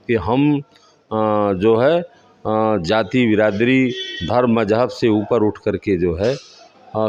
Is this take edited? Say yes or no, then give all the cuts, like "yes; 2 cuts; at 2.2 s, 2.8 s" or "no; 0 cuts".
no; 0 cuts